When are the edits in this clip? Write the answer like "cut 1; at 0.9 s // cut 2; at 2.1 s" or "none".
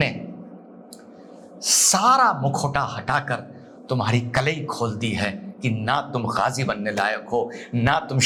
none